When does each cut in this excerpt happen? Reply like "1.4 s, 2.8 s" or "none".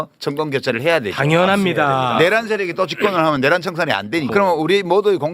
4.3 s